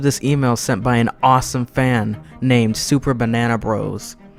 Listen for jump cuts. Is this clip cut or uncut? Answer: uncut